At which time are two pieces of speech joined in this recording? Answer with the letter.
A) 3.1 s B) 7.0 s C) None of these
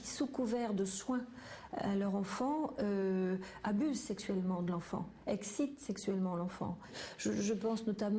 B